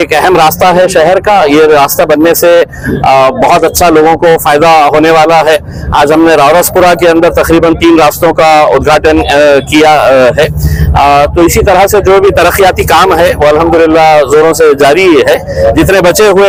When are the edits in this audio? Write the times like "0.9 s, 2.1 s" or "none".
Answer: none

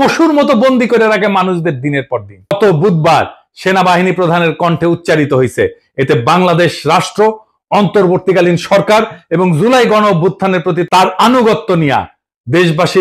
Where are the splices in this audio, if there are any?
2.5 s

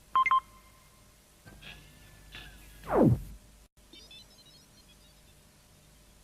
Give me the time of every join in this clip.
3.4 s

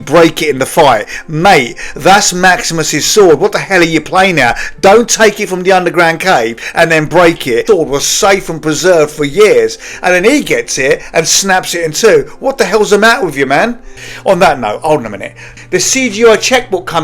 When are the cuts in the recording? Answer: 7.6 s, 13.8 s

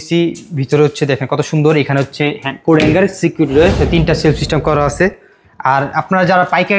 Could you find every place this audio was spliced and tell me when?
3.8 s

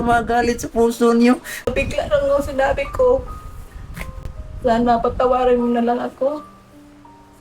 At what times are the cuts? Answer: 1.7 s

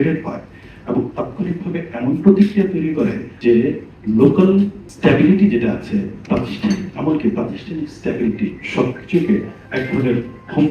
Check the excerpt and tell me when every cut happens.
3.3 s, 3.9 s, 4.8 s, 9.6 s

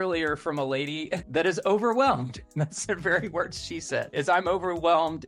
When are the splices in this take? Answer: 1.2 s, 4.1 s

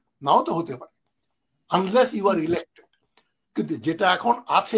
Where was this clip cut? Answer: none

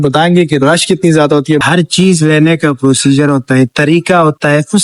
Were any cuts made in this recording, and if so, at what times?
1.6 s

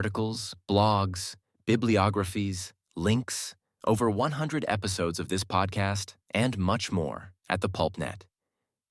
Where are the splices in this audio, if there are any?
none

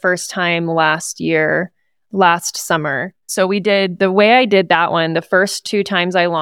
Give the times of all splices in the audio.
none

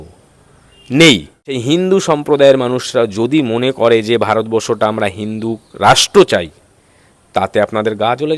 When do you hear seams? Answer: 1.6 s

